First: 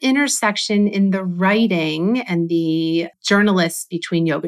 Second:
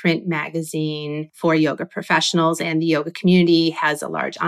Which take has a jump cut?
second; 1 cut; at 1.3 s

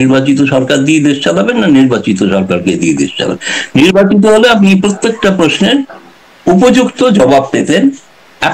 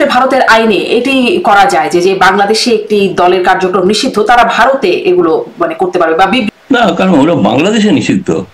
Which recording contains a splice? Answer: second; 1 cut; at 6.5 s

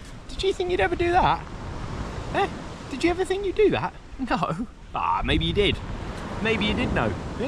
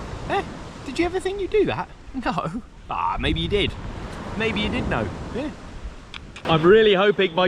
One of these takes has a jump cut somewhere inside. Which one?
second; 1 cut; at 6.4 s

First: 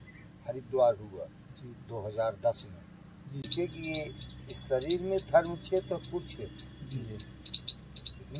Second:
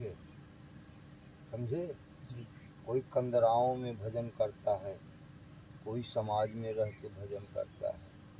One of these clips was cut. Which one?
first; 1 cut; at 3.5 s

